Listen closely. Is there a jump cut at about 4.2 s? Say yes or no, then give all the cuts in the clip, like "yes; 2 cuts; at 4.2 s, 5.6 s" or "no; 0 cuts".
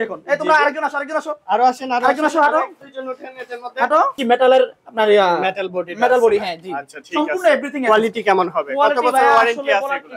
yes; 1 cut; at 4.2 s